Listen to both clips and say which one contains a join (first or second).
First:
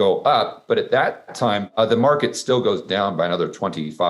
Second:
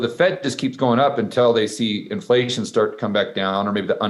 first